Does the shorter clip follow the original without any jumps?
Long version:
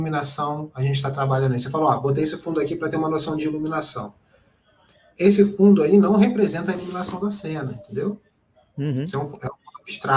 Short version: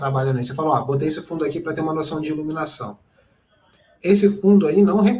yes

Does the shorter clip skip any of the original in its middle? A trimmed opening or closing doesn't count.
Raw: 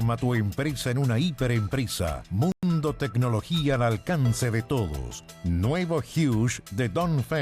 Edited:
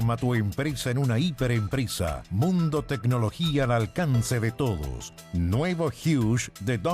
yes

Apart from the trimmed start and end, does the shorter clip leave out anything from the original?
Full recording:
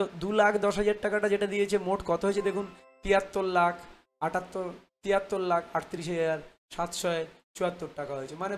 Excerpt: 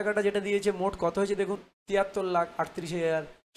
yes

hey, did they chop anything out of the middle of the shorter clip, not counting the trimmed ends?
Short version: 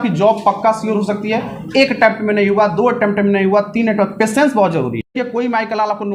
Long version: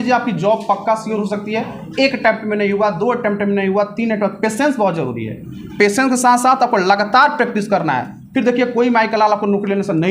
yes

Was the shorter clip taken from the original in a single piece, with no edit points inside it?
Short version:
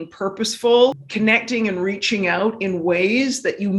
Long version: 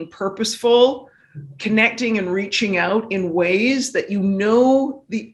no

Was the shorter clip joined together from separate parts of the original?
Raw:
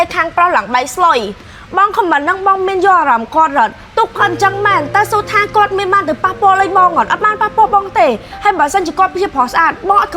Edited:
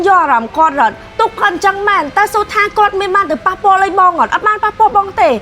no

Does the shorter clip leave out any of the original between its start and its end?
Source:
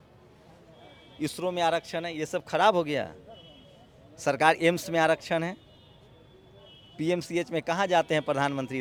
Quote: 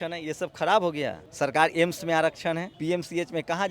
yes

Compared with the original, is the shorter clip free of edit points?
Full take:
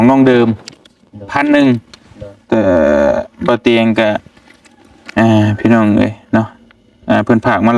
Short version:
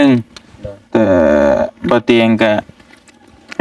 yes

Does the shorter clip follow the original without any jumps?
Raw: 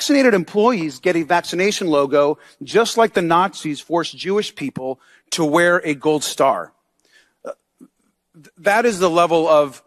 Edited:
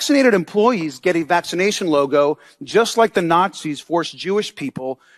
yes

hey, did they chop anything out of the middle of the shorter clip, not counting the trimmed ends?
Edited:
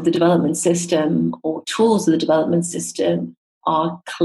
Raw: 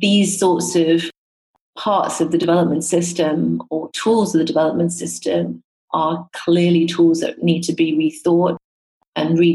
no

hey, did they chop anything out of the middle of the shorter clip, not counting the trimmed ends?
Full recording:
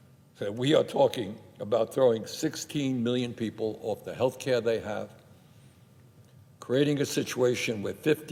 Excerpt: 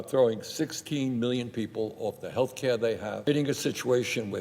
yes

